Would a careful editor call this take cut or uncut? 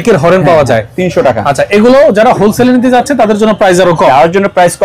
uncut